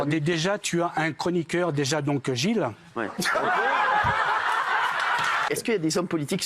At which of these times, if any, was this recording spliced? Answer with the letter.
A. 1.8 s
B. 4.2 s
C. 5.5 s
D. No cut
C